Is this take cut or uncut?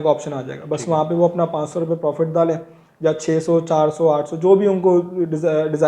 uncut